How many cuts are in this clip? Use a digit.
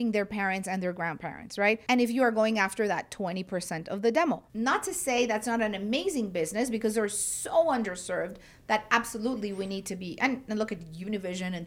2